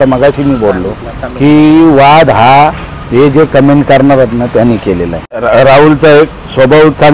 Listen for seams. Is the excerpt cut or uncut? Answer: cut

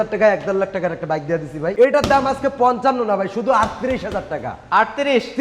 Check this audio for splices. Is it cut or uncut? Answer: cut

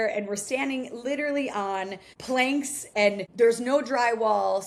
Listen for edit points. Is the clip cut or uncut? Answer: uncut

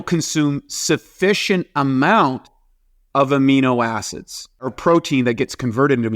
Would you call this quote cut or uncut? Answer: cut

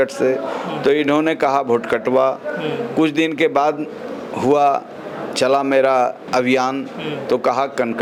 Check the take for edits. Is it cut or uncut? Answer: uncut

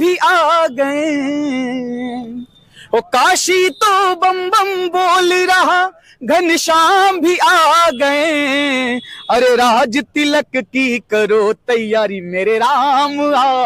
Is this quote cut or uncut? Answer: uncut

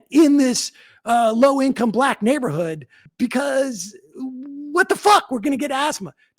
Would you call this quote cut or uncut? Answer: cut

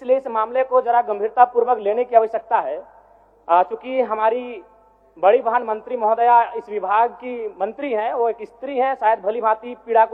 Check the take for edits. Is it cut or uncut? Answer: uncut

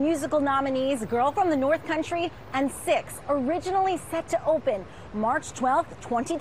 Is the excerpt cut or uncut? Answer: uncut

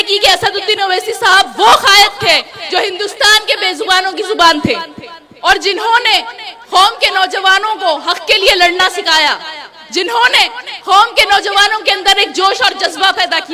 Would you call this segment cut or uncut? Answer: uncut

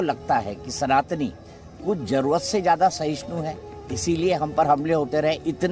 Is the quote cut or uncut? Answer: uncut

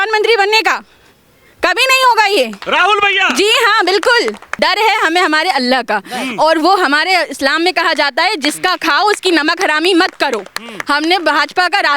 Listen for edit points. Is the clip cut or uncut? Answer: cut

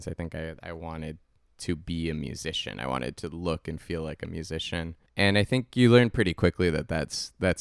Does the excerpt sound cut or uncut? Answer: cut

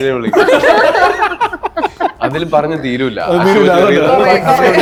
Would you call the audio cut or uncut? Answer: uncut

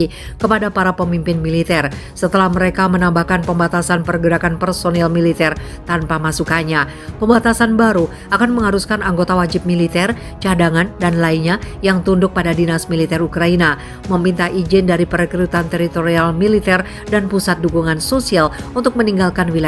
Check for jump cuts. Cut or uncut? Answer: uncut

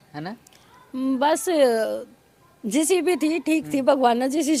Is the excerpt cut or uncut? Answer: uncut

